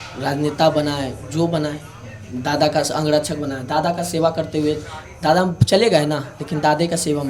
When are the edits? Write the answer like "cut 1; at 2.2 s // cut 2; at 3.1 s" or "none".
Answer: none